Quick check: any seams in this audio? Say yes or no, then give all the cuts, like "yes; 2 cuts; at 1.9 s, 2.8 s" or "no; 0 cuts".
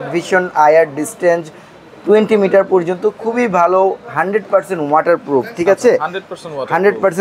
no; 0 cuts